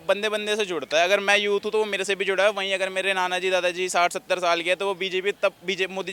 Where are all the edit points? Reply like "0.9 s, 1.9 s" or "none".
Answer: none